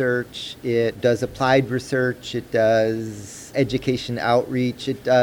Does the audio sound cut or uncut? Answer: cut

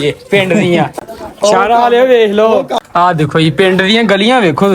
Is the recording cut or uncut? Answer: cut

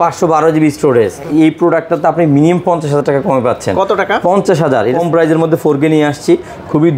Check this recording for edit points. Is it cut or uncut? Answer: cut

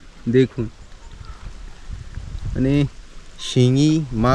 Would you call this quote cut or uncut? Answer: uncut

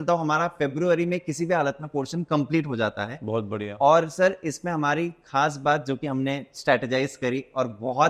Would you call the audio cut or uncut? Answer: uncut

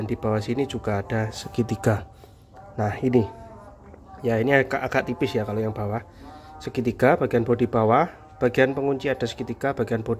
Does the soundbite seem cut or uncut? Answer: uncut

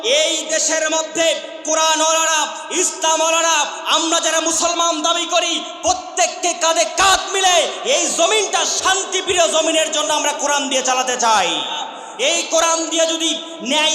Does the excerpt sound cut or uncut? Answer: cut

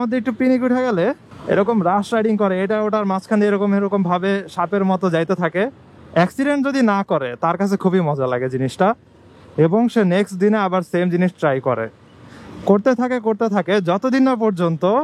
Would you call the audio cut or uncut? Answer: uncut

